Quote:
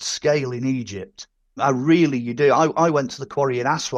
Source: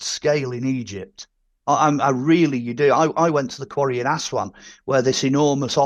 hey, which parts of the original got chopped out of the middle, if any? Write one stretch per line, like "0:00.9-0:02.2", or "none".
0:01.6-0:02.0